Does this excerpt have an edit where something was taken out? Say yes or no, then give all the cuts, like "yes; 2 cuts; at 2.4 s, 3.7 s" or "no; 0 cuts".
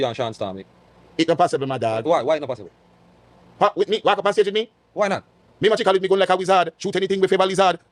no; 0 cuts